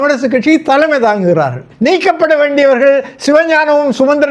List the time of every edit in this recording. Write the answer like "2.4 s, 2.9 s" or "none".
1.6 s